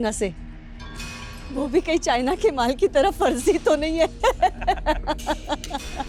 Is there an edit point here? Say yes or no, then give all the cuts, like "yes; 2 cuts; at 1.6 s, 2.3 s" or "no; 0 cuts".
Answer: no; 0 cuts